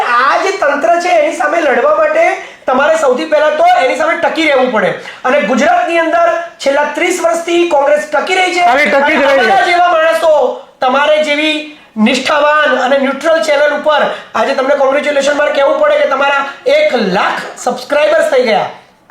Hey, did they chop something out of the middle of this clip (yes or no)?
no